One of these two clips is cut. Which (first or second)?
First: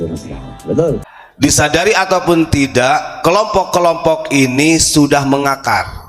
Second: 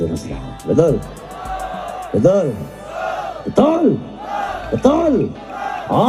first